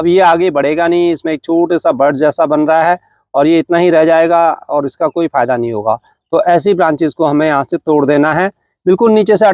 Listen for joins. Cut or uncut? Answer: uncut